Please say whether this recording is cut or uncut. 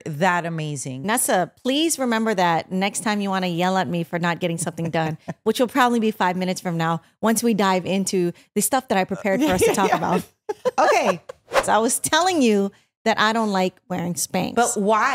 cut